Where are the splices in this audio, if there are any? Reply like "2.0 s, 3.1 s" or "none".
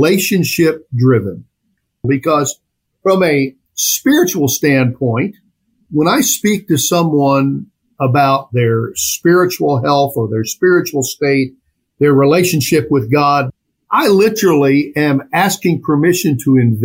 2.0 s, 13.5 s